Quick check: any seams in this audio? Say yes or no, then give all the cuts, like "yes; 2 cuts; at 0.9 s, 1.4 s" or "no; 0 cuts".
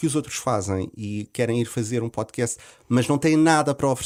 no; 0 cuts